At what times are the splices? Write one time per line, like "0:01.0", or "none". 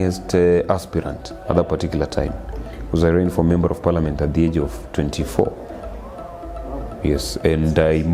none